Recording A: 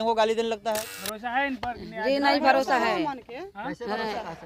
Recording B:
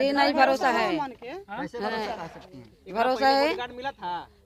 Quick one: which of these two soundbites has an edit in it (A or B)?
A